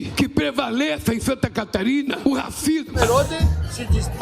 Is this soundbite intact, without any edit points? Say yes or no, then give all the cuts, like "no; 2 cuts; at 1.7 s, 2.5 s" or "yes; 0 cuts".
no; 1 cut; at 3.0 s